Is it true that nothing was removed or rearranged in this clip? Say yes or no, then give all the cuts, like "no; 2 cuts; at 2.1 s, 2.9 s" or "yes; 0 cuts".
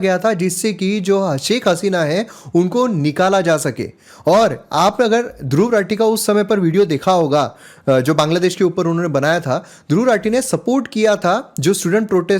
yes; 0 cuts